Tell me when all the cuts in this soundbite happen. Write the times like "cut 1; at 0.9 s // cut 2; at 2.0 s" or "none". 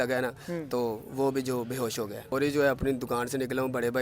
cut 1; at 2.2 s